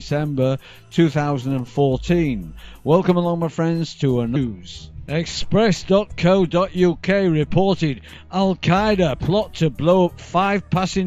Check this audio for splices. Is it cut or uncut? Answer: uncut